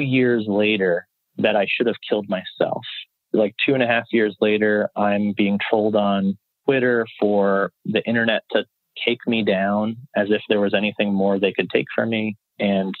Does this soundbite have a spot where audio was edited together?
no; 0 cuts

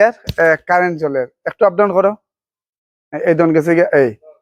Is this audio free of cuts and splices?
yes; 0 cuts

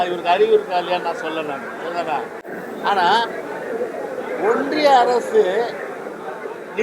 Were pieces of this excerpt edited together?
no; 0 cuts

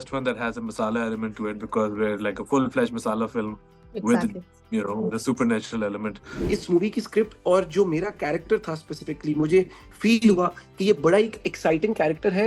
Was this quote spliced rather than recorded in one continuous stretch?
yes; 1 cut; at 6.3 s

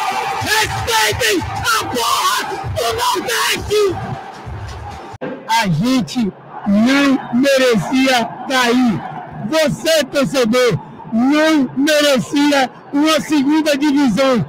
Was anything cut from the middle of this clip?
yes; 1 cut; at 5.1 s

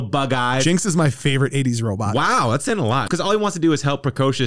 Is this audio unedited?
no; 1 cut; at 3.0 s

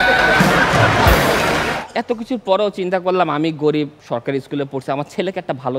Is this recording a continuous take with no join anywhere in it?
no; 1 cut; at 1.7 s

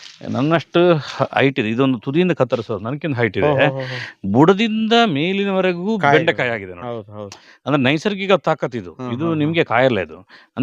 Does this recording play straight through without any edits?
yes; 0 cuts

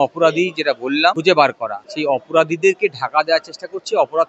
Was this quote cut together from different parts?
yes; 2 cuts; at 1.2 s, 1.8 s

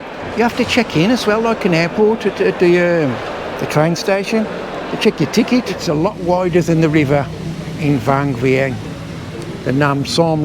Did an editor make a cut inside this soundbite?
yes; 1 cut; at 5.8 s

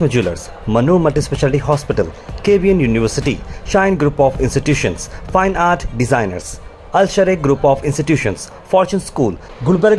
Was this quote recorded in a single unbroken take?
yes; 0 cuts

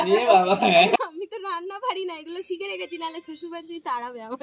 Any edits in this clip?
yes; 1 cut; at 1.0 s

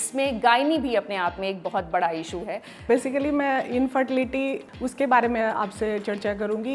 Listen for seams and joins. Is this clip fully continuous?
no; 2 cuts; at 2.8 s, 4.7 s

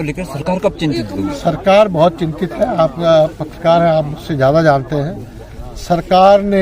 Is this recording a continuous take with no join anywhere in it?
yes; 0 cuts

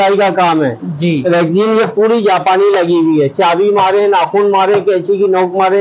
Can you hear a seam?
no; 0 cuts

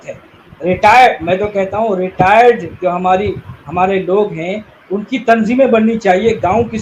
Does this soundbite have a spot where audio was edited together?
no; 0 cuts

